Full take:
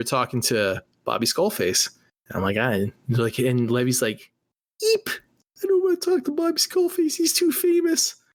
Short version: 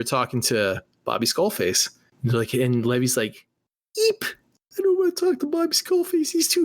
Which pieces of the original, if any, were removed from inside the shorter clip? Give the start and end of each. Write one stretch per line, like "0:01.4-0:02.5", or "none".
0:02.2-0:03.0